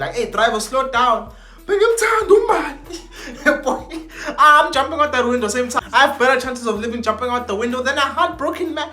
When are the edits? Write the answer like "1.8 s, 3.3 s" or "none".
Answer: 5.7 s